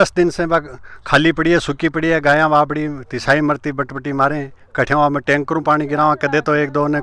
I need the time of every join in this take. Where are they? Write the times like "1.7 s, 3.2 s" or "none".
none